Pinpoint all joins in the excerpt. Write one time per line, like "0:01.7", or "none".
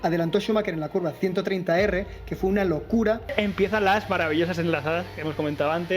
0:03.3